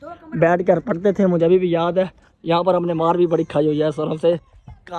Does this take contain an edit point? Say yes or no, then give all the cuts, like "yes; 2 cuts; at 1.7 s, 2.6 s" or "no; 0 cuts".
no; 0 cuts